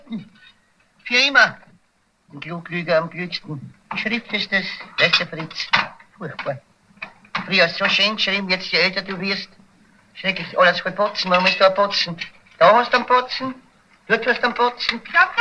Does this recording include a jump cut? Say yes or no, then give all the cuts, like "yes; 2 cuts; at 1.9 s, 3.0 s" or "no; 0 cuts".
yes; 1 cut; at 12.4 s